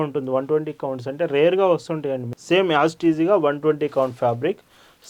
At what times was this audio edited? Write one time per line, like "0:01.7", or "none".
0:02.3